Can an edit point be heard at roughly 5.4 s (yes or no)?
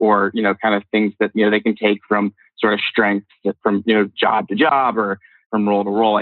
yes